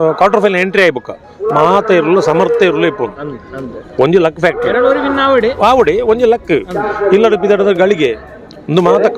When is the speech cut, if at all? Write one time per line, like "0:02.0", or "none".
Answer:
none